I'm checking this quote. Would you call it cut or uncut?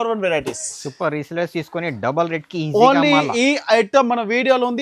uncut